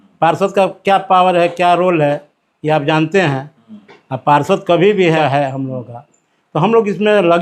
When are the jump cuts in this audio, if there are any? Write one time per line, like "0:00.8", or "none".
0:05.2

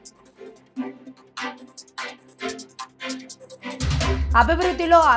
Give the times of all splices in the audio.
none

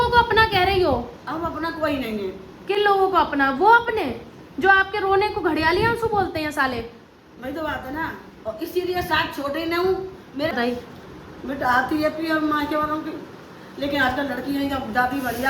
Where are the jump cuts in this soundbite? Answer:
0:10.5

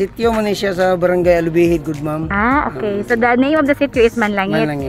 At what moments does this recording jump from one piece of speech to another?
none

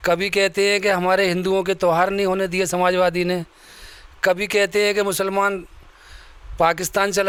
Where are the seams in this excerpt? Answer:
none

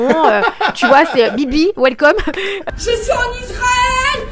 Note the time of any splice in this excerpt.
0:02.7

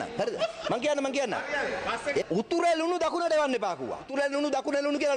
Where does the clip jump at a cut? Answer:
0:02.2
0:04.1

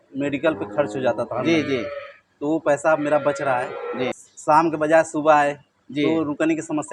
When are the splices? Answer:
0:04.2

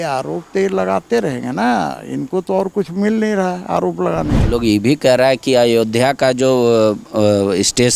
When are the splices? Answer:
0:04.4

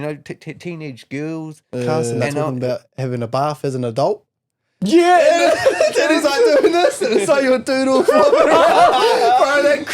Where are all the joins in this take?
0:02.5

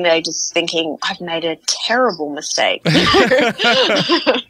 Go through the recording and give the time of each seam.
0:01.1

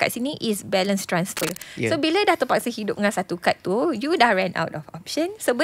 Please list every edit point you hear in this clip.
0:01.4

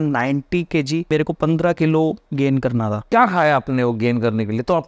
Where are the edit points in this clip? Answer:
0:01.1
0:03.1

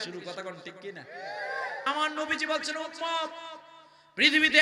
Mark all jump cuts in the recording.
0:01.9

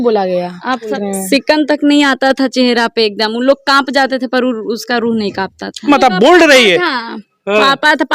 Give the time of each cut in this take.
0:01.0
0:05.9

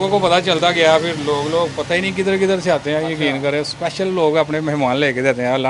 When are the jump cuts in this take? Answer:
none

